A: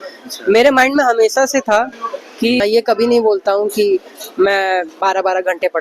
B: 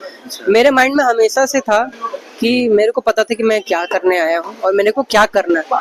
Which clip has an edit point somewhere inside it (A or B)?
A